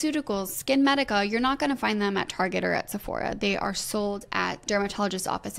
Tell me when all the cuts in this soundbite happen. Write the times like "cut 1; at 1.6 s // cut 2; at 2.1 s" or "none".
cut 1; at 4.6 s